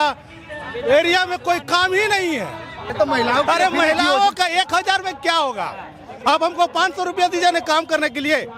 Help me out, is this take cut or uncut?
cut